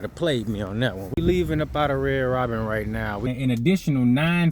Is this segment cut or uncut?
cut